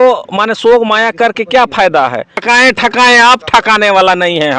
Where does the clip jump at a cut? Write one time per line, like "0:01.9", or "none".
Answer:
0:02.4